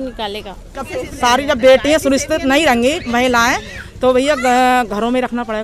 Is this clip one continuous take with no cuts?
no; 1 cut; at 1.0 s

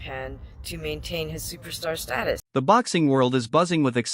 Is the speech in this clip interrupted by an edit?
yes; 1 cut; at 2.4 s

